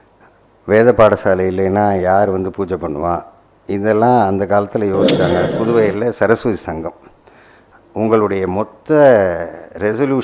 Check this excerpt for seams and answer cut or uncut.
cut